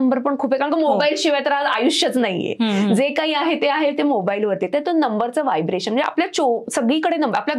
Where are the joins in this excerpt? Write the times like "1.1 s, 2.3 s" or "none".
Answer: none